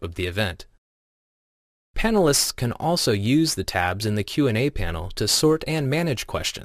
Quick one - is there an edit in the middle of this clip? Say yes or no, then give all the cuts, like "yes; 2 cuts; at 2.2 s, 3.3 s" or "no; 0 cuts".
yes; 1 cut; at 4.0 s